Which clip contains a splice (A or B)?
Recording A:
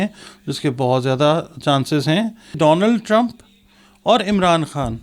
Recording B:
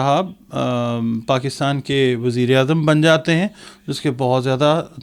A